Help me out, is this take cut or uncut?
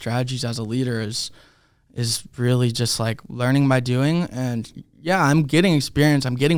uncut